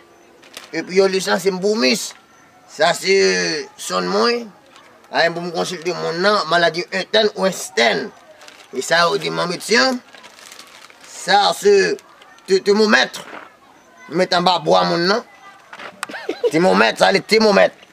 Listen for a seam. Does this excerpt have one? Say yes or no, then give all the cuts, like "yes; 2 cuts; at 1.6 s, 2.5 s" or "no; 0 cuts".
no; 0 cuts